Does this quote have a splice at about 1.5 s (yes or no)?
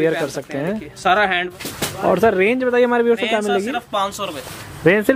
yes